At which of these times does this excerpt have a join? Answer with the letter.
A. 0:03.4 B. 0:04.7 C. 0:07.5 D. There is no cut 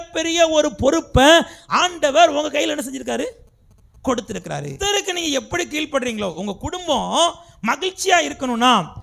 B